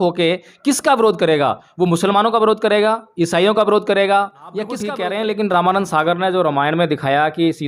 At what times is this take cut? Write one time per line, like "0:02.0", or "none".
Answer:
0:04.8